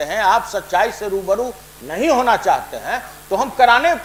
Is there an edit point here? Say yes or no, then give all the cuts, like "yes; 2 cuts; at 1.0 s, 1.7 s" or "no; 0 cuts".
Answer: no; 0 cuts